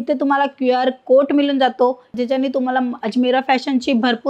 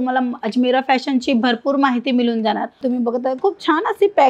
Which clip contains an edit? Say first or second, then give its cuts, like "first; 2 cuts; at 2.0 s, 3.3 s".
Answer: second; 1 cut; at 2.7 s